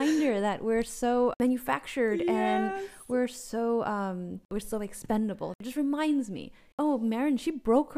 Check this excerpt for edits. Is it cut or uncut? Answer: cut